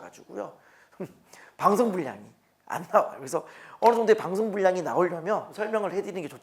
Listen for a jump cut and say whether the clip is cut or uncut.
cut